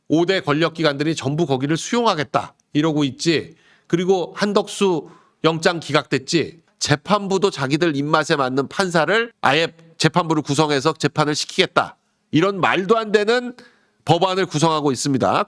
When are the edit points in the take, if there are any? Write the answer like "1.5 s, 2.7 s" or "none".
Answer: 6.7 s